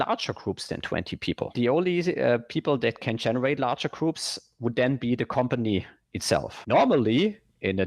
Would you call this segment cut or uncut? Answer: cut